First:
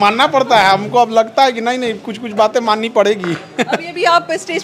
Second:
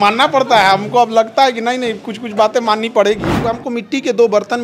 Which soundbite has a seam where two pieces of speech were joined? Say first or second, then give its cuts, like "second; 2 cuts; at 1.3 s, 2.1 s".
second; 1 cut; at 3.5 s